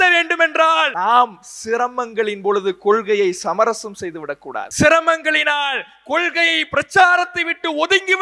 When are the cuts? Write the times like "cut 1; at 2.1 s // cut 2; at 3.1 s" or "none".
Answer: cut 1; at 0.9 s // cut 2; at 4.7 s